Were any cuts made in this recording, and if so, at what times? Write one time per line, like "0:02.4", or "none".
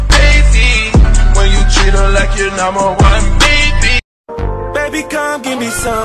none